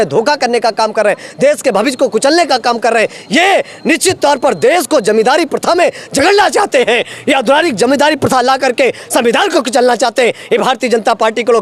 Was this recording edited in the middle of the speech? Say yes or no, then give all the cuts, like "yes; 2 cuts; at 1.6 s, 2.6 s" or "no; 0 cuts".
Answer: no; 0 cuts